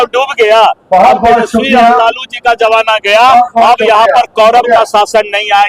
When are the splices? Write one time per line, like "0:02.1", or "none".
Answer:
none